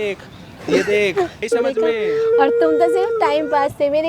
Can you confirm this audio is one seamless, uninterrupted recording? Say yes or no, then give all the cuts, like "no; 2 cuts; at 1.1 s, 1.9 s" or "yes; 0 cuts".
no; 1 cut; at 1.5 s